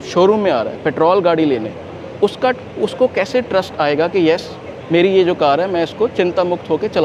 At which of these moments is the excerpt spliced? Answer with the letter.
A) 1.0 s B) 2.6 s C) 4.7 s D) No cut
D